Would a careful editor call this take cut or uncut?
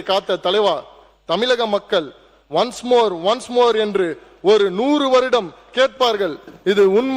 uncut